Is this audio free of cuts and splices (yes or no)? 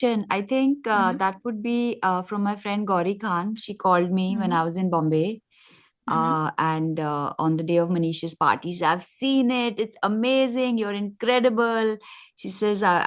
yes